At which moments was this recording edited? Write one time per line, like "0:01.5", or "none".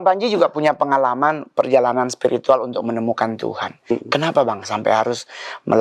none